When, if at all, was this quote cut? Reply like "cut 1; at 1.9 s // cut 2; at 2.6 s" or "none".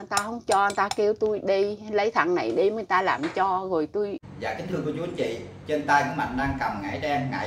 cut 1; at 4.2 s